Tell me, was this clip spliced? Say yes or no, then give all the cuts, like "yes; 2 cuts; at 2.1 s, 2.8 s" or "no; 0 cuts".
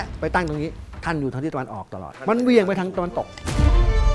yes; 2 cuts; at 0.9 s, 2.2 s